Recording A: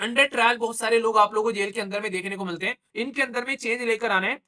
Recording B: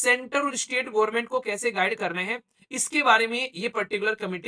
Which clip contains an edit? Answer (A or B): A